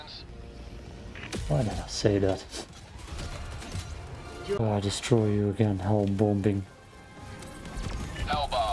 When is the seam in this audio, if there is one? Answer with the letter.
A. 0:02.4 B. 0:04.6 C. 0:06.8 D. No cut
B